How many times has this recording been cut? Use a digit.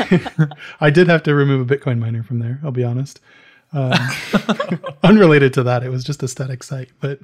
0